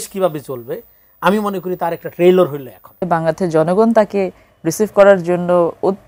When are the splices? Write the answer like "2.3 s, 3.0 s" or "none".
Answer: 3.1 s

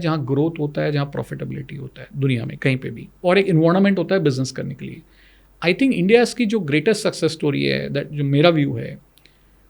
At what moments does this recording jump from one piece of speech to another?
none

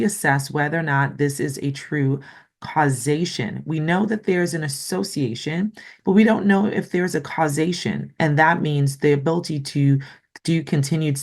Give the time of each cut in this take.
none

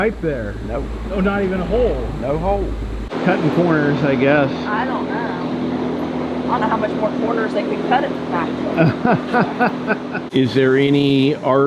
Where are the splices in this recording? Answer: 3.1 s, 10.2 s

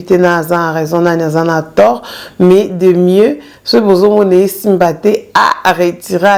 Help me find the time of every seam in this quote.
none

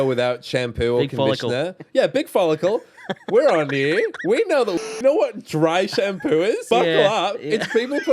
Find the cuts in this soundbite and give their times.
4.8 s, 6.6 s

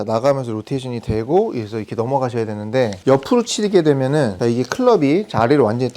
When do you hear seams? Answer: 3.0 s, 4.3 s

